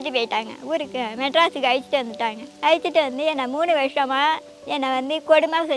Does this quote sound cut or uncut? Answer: cut